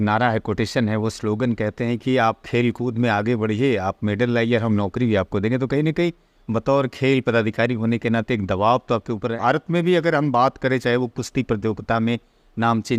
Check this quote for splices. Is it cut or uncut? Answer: cut